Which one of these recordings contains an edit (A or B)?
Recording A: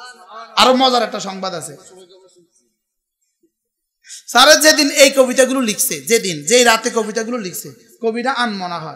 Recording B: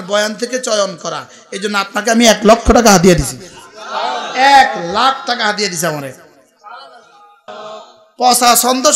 B